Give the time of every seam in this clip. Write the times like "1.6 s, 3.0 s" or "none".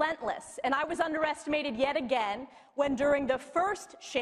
2.1 s